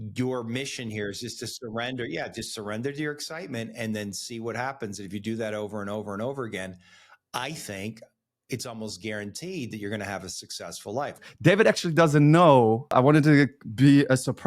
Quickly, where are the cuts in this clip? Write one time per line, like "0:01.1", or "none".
0:11.3
0:12.9